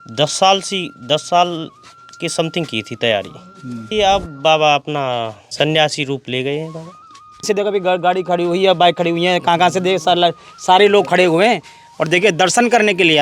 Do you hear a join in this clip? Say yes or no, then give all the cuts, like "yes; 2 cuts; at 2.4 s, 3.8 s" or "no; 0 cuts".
yes; 3 cuts; at 3.9 s, 5.4 s, 7.5 s